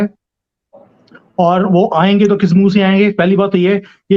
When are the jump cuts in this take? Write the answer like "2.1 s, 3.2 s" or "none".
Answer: none